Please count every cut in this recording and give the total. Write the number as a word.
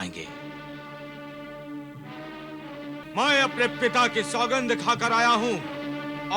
one